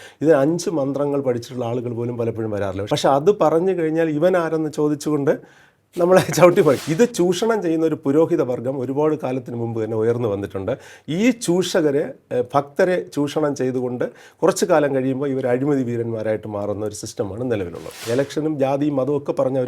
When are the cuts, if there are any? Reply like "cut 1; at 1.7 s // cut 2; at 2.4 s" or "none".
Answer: cut 1; at 2.8 s // cut 2; at 6.8 s // cut 3; at 17.9 s